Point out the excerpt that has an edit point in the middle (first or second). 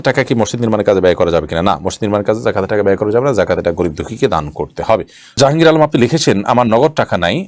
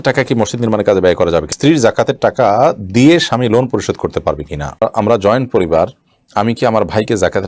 second